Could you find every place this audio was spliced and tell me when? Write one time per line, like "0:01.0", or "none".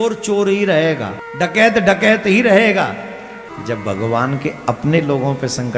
0:01.2
0:03.5